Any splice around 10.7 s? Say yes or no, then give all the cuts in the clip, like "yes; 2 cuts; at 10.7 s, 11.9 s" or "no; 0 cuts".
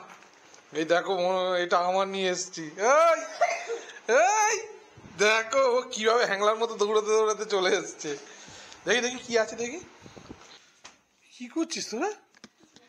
yes; 1 cut; at 10.7 s